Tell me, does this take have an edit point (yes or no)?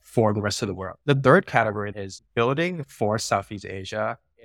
yes